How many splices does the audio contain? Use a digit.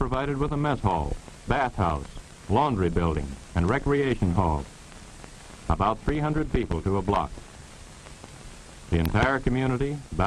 1